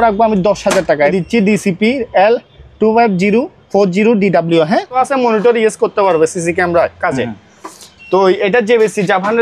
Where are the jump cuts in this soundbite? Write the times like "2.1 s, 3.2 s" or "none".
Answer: 1.1 s, 4.9 s

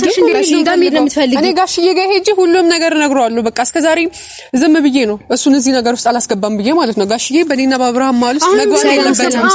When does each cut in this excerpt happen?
none

